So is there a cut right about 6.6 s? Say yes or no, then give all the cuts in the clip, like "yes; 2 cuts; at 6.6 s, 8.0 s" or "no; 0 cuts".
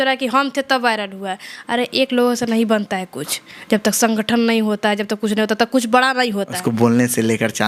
yes; 1 cut; at 6.6 s